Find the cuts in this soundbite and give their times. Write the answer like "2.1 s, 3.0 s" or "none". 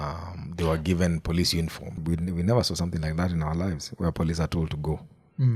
2.0 s